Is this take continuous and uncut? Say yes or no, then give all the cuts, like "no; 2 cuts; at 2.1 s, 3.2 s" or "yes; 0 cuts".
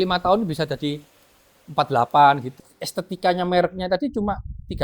no; 1 cut; at 2.6 s